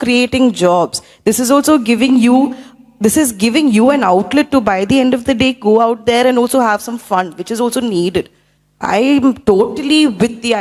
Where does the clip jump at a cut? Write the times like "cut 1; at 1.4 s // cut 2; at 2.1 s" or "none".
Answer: none